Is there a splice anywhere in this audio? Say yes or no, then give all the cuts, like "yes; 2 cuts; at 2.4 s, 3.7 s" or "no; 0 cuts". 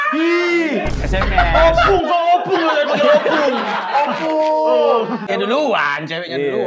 yes; 2 cuts; at 0.9 s, 5.3 s